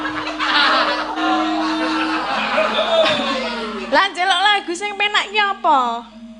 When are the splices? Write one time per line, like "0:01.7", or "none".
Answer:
0:01.2